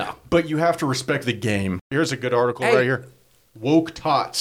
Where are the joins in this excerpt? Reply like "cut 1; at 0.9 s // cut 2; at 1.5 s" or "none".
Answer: cut 1; at 1.9 s